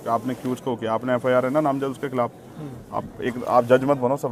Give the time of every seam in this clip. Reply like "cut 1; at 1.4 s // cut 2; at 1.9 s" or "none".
none